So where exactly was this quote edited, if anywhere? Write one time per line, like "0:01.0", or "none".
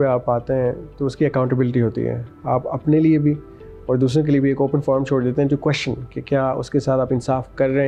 none

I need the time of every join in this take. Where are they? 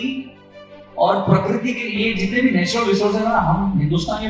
none

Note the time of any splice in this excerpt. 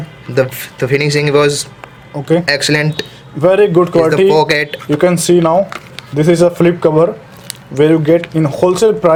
none

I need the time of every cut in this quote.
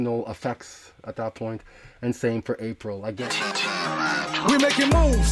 0:03.2

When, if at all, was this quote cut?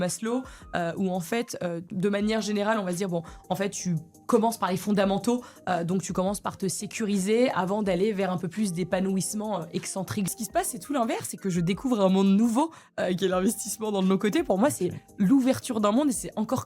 0:01.9
0:10.3

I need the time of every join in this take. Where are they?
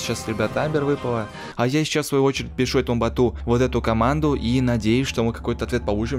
0:01.5

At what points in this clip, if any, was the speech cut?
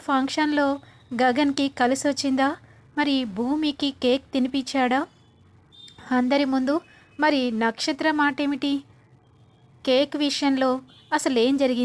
none

